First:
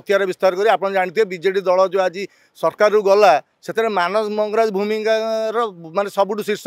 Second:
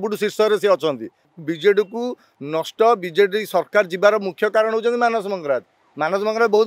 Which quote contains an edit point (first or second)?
second